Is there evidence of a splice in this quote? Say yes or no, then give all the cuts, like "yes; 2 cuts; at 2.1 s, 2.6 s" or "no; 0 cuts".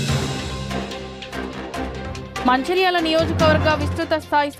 no; 0 cuts